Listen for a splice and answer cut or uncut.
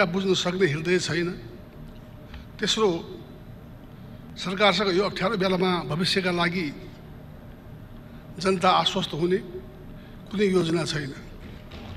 uncut